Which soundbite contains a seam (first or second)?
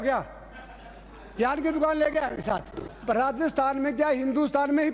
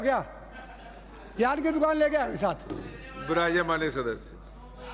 first